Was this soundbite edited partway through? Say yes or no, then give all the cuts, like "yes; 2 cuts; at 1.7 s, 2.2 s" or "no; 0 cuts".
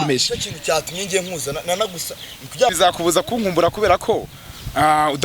yes; 1 cut; at 2.8 s